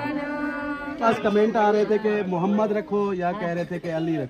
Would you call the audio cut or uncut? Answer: cut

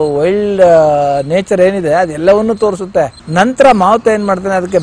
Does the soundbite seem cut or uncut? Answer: cut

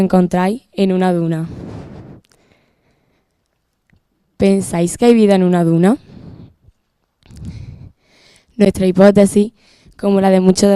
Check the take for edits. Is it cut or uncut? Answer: cut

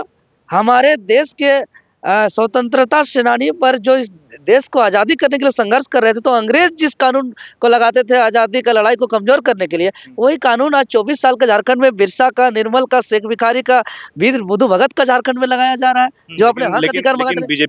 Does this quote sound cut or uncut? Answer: uncut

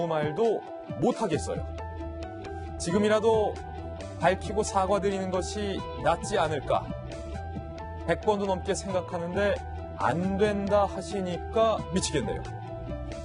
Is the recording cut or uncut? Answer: uncut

